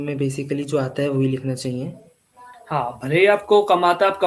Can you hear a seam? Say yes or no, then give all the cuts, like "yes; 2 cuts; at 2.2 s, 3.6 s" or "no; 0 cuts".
no; 0 cuts